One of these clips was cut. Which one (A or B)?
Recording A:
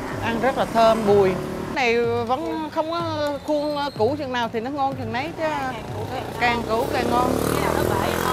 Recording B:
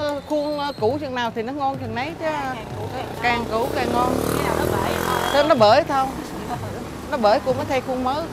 A